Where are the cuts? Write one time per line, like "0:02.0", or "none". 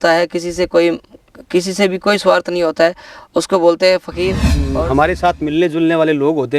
0:04.6